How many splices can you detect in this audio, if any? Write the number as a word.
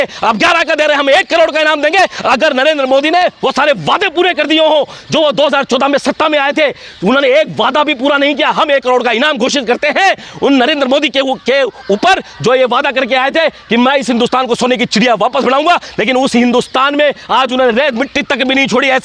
zero